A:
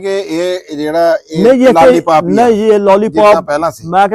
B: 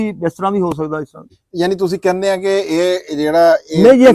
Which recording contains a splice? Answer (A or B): B